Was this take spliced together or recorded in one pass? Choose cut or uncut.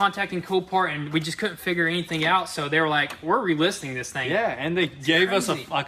uncut